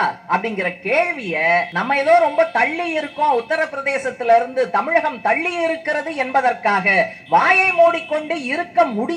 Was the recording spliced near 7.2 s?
no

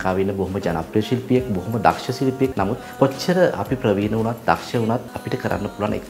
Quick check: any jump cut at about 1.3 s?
no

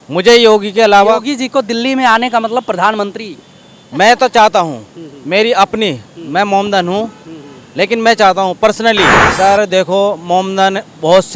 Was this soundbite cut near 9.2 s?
yes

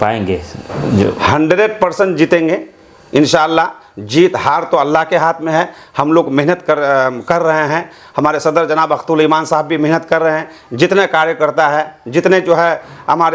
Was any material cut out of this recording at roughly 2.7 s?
no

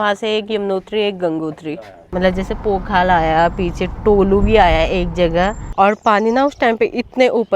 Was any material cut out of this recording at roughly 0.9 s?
no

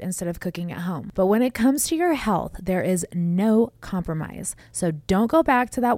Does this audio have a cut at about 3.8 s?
no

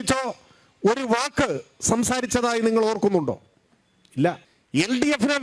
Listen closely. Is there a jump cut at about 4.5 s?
yes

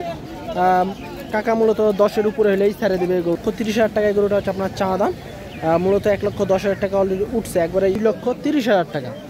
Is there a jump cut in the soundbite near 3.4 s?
yes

